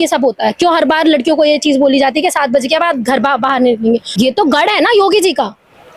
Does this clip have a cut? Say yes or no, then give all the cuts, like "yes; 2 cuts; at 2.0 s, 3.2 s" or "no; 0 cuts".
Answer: yes; 1 cut; at 4.1 s